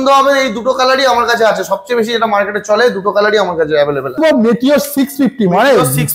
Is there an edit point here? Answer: yes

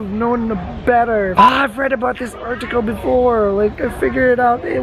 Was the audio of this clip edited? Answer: yes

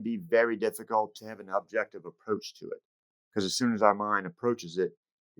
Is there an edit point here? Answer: yes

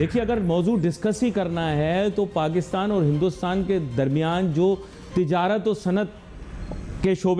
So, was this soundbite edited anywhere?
no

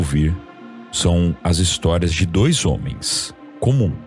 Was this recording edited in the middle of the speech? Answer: no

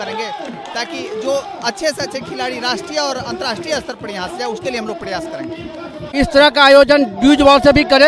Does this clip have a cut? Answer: yes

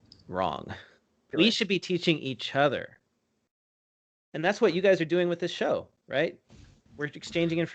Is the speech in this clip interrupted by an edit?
yes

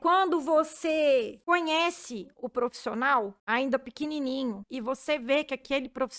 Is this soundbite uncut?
no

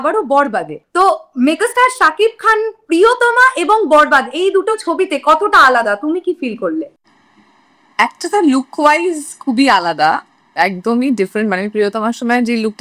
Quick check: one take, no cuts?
yes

